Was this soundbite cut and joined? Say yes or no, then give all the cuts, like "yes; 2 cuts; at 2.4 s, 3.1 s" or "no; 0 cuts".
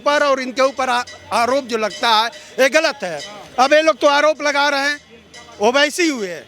no; 0 cuts